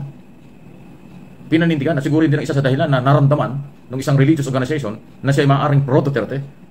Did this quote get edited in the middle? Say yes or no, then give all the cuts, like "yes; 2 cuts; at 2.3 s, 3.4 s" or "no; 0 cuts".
no; 0 cuts